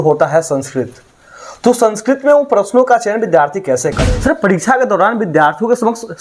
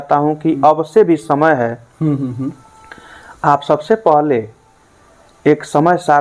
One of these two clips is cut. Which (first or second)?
first